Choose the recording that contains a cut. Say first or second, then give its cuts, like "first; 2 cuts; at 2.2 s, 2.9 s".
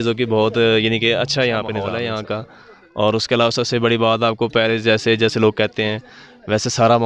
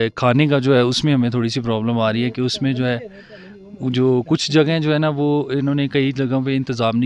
first; 1 cut; at 1.9 s